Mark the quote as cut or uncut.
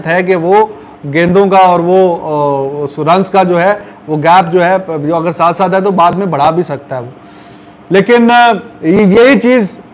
uncut